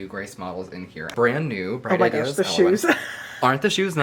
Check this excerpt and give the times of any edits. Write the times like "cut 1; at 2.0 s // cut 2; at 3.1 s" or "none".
cut 1; at 1.1 s